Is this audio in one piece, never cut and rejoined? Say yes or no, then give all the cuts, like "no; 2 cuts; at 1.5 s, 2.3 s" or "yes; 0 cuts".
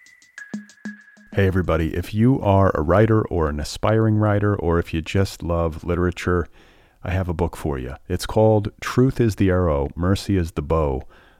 no; 1 cut; at 0.9 s